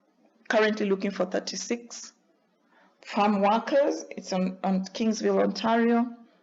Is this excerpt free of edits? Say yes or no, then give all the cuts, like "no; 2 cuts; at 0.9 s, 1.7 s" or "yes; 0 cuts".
yes; 0 cuts